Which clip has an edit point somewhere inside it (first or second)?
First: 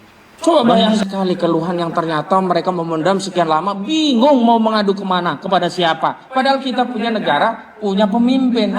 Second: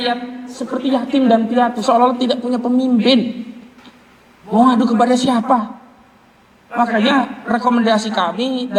first